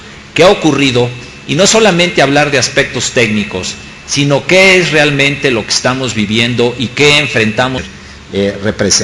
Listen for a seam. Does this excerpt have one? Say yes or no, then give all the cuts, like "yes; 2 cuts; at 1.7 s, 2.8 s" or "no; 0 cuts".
no; 0 cuts